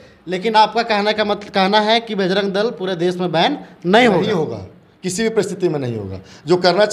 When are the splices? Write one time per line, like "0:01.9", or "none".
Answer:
none

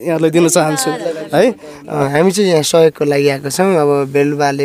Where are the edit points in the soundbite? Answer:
0:02.0

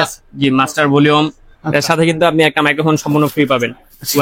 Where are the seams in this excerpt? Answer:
0:01.5

